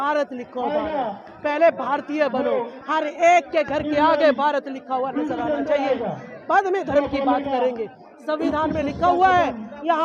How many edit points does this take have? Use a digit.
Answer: 0